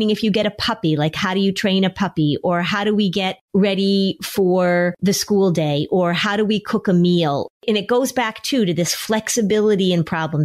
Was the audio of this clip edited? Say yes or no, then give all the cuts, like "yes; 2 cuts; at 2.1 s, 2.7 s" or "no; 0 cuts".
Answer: yes; 3 cuts; at 3.4 s, 5.0 s, 7.5 s